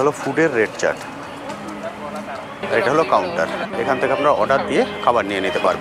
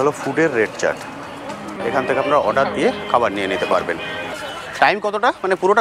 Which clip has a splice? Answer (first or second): second